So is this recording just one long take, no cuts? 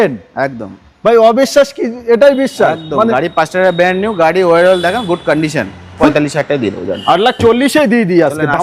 no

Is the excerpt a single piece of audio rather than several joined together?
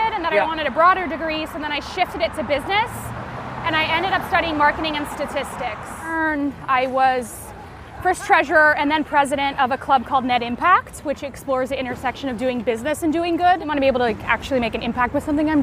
no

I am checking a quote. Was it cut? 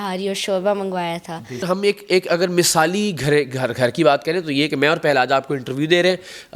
yes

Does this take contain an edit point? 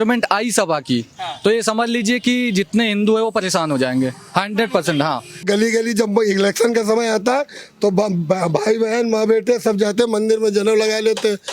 yes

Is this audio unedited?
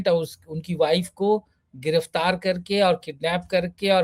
yes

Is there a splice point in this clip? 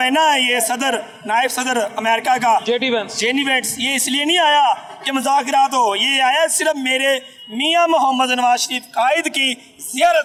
no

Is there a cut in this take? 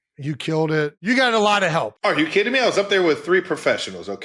yes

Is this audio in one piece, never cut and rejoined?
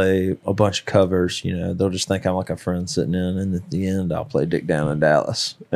yes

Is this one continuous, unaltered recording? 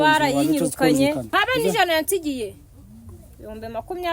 no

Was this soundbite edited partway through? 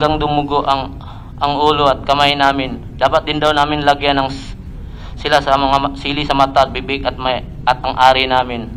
no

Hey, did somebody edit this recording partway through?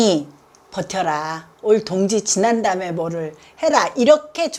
no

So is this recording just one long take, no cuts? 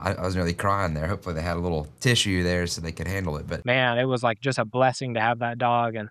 no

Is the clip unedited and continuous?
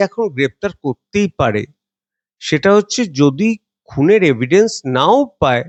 yes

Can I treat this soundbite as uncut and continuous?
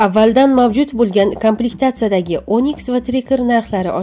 yes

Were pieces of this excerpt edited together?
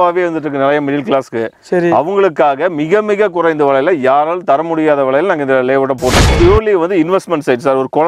yes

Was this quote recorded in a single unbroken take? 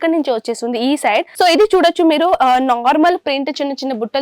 no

